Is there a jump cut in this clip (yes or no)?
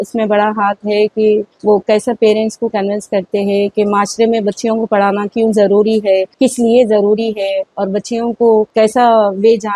yes